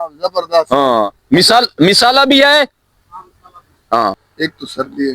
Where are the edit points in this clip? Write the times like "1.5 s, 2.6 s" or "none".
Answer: 4.2 s